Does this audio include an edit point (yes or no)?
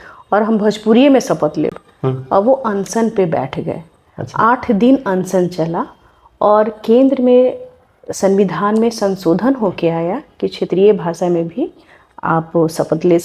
no